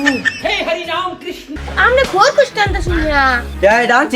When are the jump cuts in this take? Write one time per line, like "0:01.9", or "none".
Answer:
0:01.5